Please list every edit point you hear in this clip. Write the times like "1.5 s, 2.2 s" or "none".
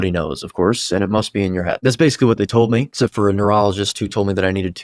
1.8 s, 2.9 s